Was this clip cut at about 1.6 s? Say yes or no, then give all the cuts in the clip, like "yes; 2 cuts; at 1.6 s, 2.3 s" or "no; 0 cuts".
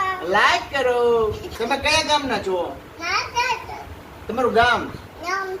yes; 1 cut; at 1.6 s